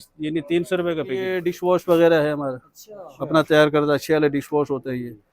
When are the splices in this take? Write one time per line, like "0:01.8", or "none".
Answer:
0:01.5